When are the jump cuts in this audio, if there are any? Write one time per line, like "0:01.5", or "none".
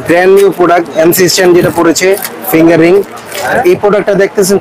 0:03.5